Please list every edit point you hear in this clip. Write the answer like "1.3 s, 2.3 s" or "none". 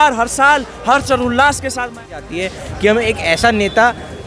2.2 s